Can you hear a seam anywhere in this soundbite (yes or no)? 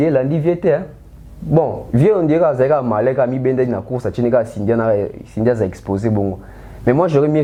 no